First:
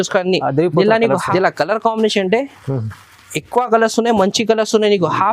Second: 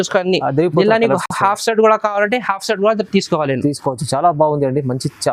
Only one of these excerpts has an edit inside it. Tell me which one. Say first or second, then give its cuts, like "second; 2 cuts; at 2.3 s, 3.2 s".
first; 1 cut; at 1.2 s